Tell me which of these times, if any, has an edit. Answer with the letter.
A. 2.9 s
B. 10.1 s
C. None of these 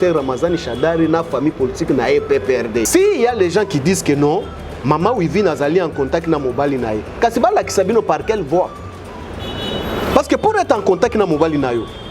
A